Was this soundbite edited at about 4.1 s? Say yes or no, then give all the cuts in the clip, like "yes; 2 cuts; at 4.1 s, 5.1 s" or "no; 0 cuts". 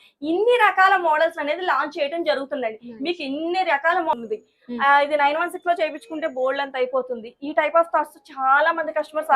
yes; 1 cut; at 4.1 s